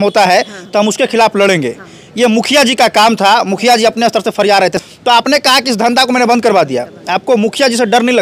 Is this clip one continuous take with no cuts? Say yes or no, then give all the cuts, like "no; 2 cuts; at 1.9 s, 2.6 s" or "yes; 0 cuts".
no; 1 cut; at 4.8 s